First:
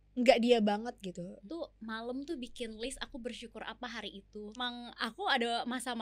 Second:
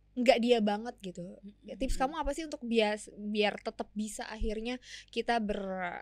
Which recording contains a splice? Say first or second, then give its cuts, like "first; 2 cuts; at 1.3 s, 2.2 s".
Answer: first; 2 cuts; at 1.5 s, 4.6 s